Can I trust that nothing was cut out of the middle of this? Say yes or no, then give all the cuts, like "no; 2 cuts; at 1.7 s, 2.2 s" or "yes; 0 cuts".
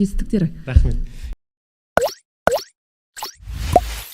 no; 1 cut; at 1.3 s